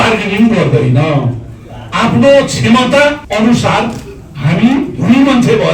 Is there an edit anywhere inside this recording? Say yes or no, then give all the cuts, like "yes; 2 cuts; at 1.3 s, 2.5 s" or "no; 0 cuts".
yes; 1 cut; at 3.2 s